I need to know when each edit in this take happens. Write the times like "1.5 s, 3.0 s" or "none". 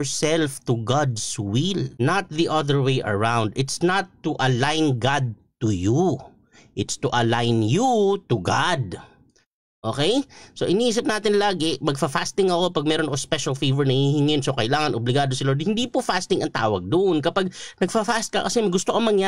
1.9 s